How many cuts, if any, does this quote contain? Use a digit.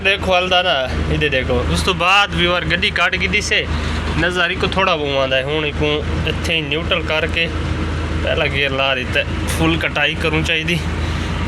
0